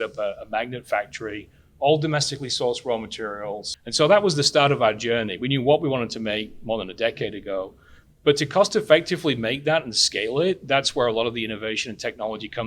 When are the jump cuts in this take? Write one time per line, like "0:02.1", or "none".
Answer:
0:03.8